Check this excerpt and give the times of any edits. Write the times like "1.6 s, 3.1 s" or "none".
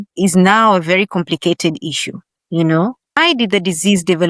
3.2 s